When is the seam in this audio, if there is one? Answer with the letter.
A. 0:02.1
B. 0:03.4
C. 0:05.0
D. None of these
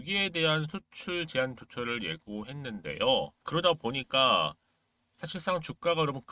B